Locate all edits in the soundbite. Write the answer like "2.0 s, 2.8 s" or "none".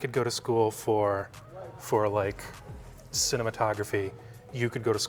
none